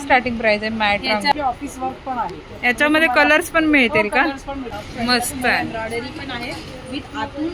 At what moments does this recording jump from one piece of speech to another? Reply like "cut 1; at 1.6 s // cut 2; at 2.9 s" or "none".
cut 1; at 1.3 s // cut 2; at 4.8 s